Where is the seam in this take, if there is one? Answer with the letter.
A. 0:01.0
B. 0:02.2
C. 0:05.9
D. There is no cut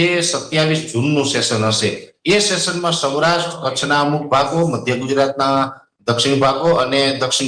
D